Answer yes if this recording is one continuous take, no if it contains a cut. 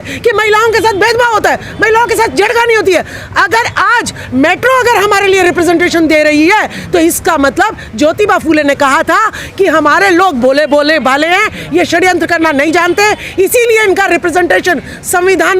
yes